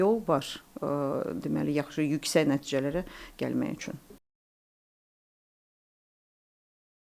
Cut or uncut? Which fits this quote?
uncut